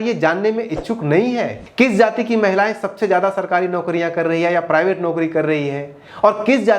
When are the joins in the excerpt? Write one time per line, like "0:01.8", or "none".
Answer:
0:01.6